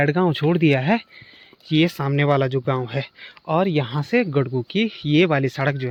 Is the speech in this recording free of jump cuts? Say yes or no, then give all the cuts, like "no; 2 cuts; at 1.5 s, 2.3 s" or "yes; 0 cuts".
yes; 0 cuts